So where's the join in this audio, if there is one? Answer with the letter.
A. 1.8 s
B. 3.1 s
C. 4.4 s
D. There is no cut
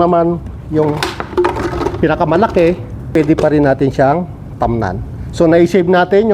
B